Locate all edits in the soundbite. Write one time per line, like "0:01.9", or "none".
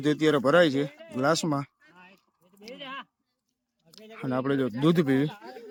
none